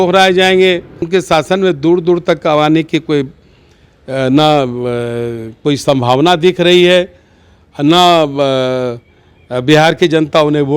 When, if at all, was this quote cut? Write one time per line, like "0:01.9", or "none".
0:01.1

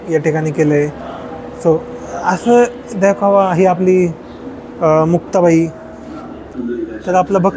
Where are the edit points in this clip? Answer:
0:06.6

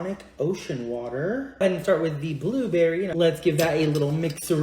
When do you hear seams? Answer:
0:01.6

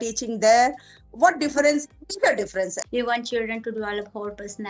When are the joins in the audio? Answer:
0:02.8

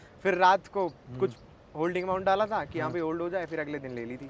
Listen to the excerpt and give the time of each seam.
none

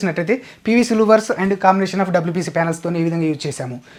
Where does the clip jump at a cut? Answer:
none

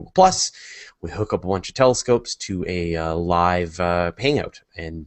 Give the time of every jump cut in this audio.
0:02.0

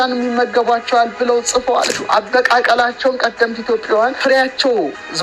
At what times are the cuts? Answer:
0:01.9
0:04.2

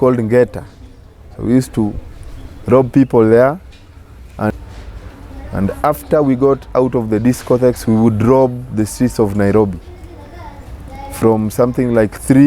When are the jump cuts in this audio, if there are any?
0:04.5

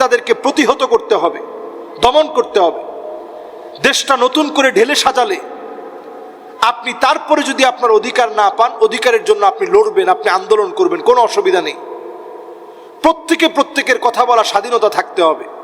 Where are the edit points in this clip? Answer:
none

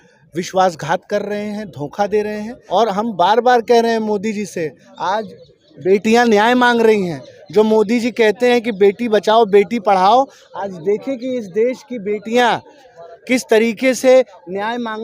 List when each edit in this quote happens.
0:02.5

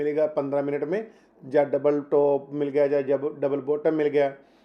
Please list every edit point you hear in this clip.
none

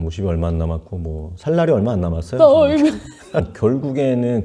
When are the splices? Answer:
0:03.5

